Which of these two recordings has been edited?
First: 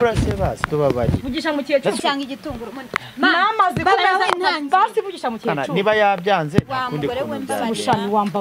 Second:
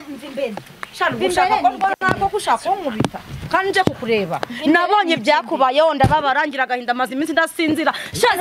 first; 1 cut; at 2.0 s

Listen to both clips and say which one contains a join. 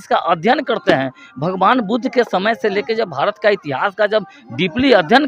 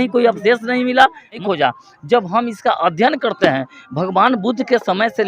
second; 1 cut; at 1.4 s

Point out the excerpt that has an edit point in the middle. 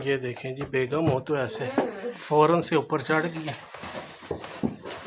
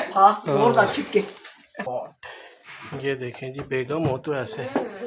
second; 1 cut; at 1.9 s

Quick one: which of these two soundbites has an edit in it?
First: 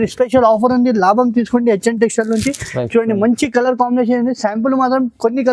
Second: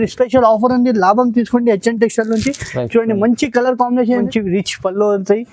second; 1 cut; at 4.3 s

